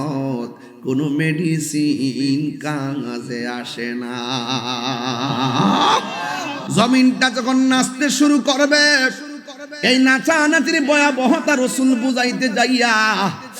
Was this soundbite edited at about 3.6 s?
no; 1 cut; at 6.5 s

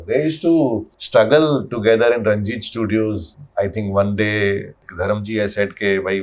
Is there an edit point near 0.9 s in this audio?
yes; 3 cuts; at 0.9 s, 3.3 s, 4.9 s

